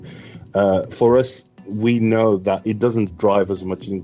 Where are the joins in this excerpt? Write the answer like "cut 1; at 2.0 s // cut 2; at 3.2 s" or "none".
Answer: cut 1; at 2.6 s